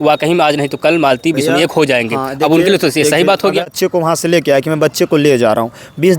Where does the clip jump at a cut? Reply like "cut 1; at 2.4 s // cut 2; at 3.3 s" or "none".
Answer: cut 1; at 3.6 s